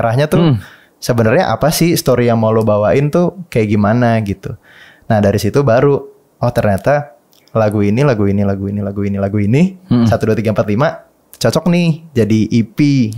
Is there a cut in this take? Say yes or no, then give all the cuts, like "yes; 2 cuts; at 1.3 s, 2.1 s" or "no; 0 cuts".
no; 0 cuts